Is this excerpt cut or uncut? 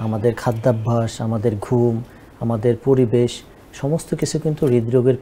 uncut